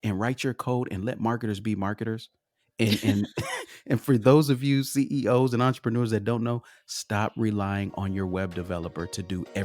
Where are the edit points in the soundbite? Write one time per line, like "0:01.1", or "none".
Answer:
none